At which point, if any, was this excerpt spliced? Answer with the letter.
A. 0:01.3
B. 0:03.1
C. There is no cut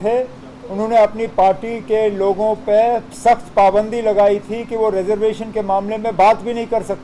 C